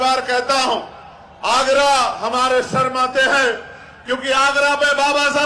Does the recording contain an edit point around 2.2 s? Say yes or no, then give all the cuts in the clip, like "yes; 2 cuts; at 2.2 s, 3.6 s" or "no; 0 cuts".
no; 0 cuts